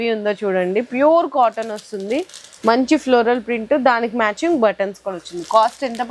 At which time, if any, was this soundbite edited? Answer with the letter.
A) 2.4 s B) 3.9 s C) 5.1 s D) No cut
D